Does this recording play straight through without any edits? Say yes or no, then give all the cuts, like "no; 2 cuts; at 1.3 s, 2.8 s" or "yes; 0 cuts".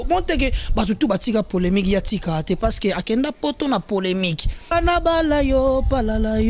no; 1 cut; at 4.7 s